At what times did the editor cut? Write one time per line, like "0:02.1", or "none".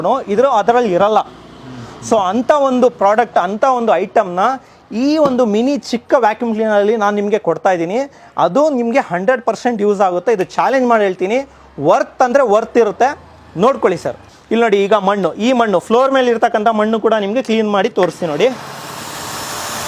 0:14.3